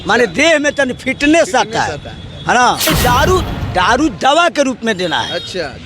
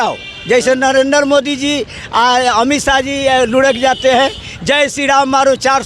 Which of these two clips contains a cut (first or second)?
first